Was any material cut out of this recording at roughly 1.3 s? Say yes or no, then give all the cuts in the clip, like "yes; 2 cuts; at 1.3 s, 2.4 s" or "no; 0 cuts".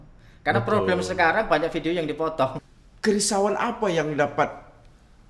no; 1 cut; at 2.6 s